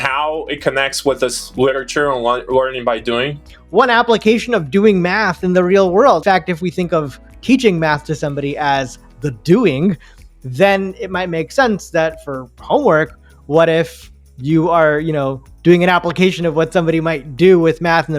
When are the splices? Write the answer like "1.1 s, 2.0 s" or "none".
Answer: 3.5 s, 6.2 s